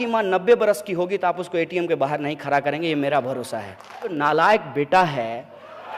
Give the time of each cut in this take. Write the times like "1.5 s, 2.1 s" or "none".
4.1 s